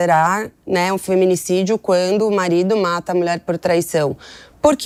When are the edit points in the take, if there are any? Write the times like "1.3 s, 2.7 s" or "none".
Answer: none